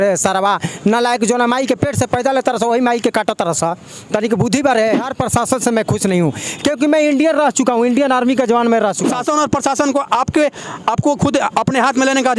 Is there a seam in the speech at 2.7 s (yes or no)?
no